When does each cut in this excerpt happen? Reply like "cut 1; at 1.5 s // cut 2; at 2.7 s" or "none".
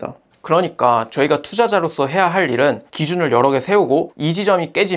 cut 1; at 2.8 s